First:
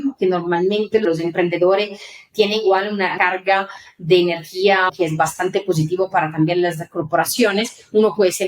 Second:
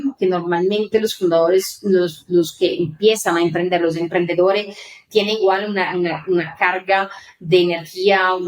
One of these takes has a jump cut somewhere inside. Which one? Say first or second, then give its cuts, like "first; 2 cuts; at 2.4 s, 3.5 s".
first; 3 cuts; at 1.0 s, 3.1 s, 4.9 s